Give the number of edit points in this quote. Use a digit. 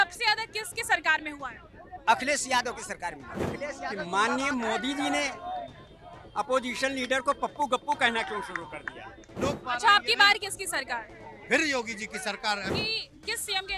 3